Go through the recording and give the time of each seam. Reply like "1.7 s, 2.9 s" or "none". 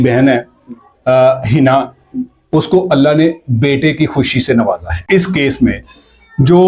5.0 s